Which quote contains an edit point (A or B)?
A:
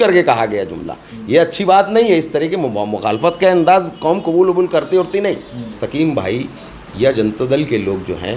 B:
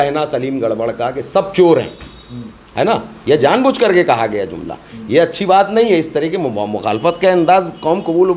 A